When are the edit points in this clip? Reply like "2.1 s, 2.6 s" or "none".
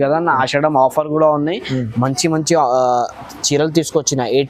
none